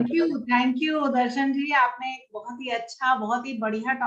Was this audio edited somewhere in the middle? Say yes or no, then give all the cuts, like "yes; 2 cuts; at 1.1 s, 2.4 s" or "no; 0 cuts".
no; 0 cuts